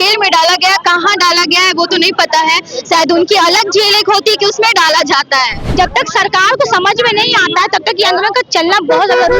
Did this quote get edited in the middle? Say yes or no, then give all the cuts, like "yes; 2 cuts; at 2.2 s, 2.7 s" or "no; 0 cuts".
yes; 1 cut; at 5.6 s